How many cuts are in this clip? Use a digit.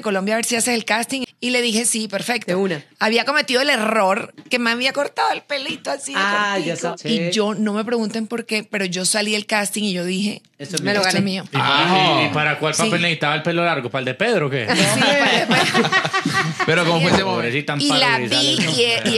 3